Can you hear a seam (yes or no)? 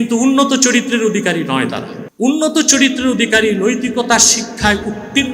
yes